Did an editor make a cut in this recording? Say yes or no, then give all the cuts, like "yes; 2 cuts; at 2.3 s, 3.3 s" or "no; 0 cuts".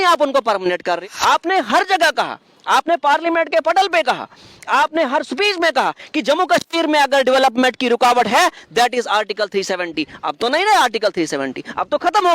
yes; 1 cut; at 1.0 s